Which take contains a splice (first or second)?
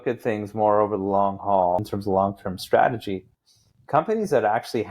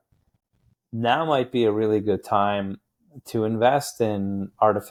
first